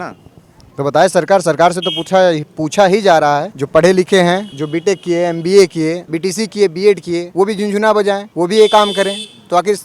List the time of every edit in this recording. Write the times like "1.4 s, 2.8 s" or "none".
3.6 s, 4.6 s, 6.1 s, 7.3 s, 8.3 s